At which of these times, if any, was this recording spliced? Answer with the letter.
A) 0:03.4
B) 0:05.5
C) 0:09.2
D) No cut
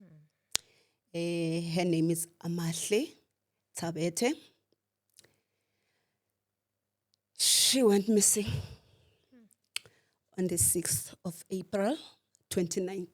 D